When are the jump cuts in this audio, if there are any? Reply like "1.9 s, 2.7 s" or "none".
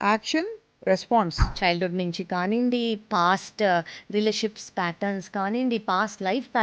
1.4 s